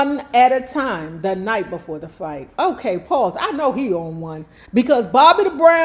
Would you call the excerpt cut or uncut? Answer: uncut